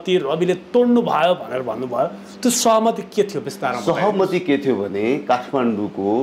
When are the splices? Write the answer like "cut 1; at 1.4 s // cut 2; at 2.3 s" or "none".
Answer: none